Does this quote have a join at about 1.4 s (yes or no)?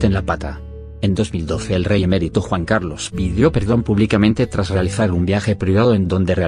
no